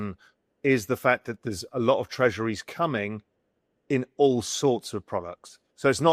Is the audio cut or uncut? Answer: uncut